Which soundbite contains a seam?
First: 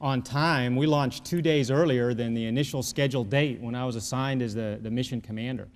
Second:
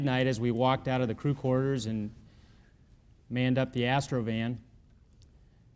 second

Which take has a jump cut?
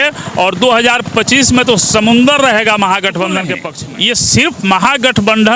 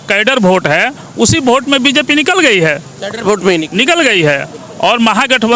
first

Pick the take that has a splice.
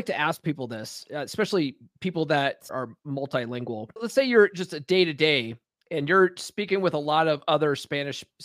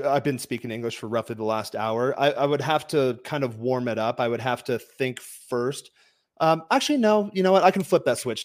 first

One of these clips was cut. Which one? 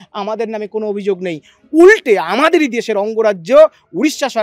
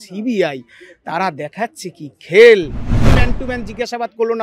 second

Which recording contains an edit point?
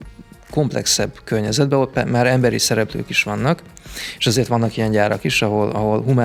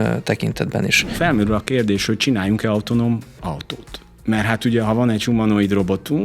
second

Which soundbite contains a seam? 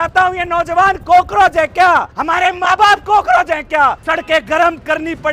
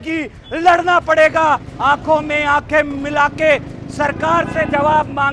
first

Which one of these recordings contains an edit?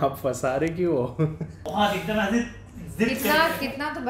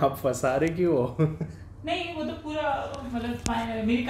first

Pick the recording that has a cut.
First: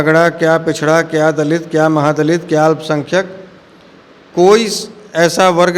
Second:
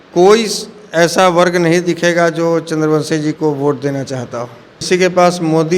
second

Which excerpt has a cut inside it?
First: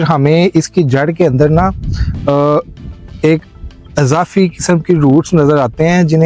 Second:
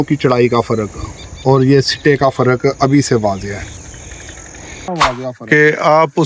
second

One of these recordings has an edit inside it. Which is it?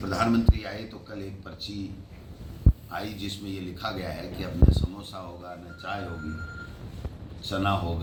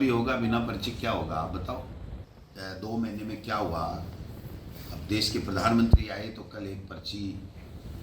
second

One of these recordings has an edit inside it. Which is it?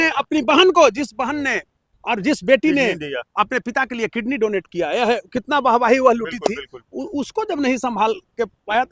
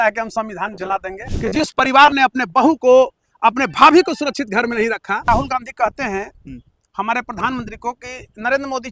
second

